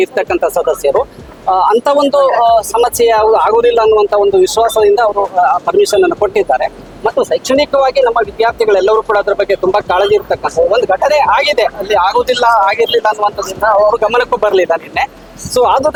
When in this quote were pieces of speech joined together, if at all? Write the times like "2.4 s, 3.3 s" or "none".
none